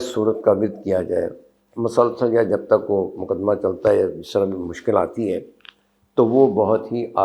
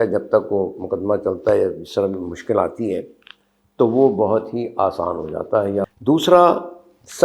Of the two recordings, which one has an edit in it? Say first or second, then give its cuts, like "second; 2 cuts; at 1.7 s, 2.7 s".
second; 1 cut; at 5.8 s